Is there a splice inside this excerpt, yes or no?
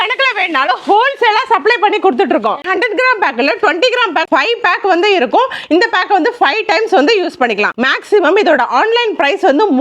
no